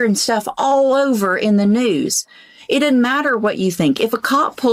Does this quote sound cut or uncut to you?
uncut